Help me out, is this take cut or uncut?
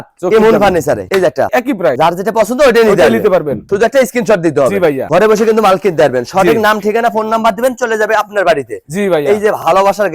uncut